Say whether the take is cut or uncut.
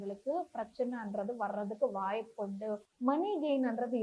cut